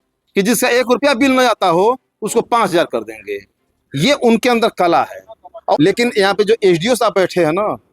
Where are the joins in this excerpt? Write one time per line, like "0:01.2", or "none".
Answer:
0:05.8